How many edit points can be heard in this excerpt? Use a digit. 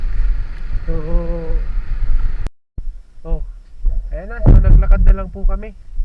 1